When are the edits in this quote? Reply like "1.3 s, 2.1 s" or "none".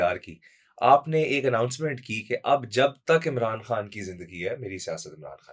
none